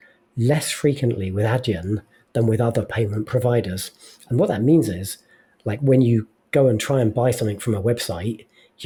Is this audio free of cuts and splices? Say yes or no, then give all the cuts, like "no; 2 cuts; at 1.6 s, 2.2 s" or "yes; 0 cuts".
yes; 0 cuts